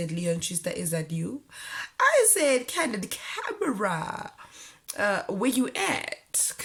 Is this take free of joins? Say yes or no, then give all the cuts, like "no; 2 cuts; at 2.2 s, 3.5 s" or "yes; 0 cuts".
yes; 0 cuts